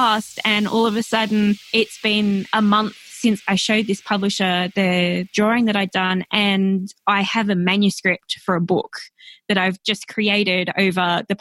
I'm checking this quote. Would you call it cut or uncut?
cut